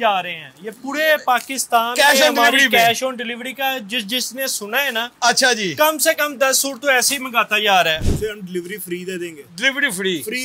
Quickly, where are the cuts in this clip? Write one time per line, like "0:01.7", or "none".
0:08.0

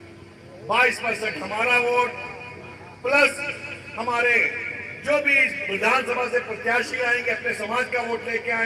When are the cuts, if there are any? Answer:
none

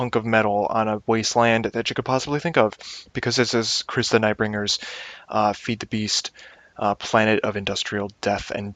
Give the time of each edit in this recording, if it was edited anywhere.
0:07.8

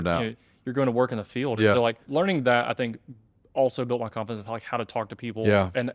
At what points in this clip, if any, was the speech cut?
0:02.0

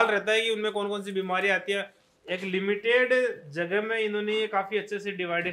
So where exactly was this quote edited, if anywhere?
0:02.0

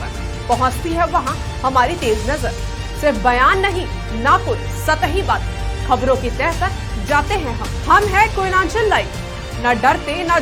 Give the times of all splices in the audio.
none

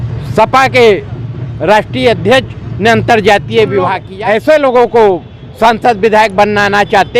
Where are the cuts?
0:04.1

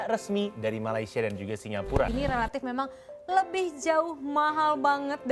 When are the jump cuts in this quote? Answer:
0:02.1

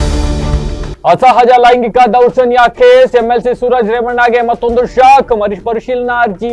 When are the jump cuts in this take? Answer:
none

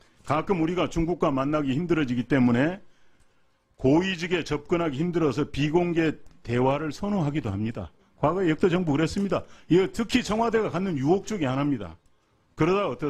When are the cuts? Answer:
0:03.3

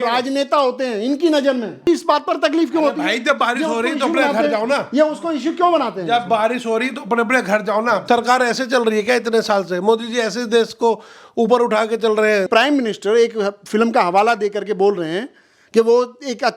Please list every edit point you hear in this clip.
0:01.9
0:08.0
0:12.5

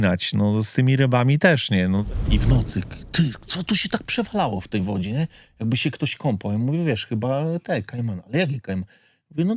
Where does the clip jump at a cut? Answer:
0:02.1

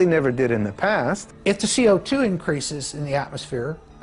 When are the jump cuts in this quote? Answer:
0:01.3

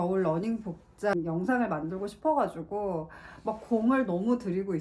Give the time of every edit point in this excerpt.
0:01.1

